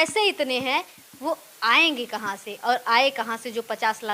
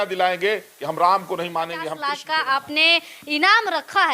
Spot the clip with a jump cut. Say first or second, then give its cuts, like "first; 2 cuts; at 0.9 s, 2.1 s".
second; 1 cut; at 1.9 s